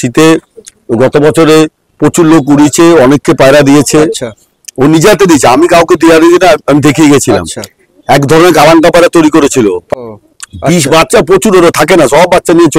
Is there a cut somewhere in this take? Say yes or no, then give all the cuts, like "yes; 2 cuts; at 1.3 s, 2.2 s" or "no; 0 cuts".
yes; 1 cut; at 9.9 s